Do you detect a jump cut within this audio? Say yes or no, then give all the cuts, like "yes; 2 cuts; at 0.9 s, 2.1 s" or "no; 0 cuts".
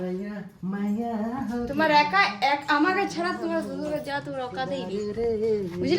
no; 0 cuts